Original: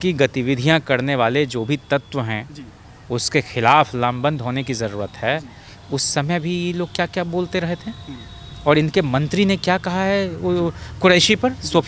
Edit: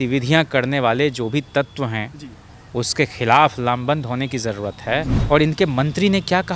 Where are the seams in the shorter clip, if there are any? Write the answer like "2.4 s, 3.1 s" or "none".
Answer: 5.1 s